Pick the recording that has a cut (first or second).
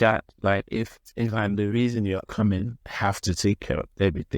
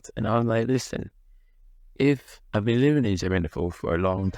first